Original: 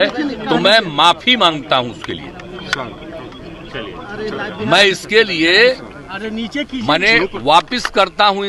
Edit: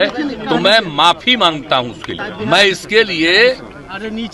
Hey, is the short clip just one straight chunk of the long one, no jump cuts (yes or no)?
no